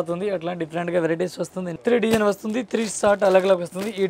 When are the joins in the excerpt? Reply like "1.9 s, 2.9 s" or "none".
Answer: 1.7 s

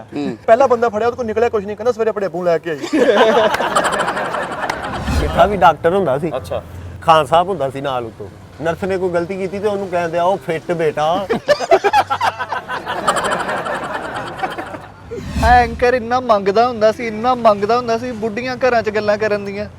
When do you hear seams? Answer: 5.1 s, 6.9 s, 15.2 s

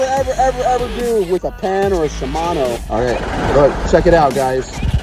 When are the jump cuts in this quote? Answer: 2.8 s

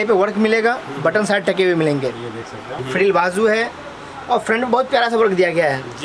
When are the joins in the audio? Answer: 2.7 s

